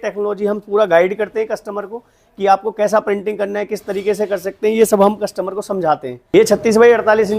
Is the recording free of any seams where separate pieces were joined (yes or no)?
no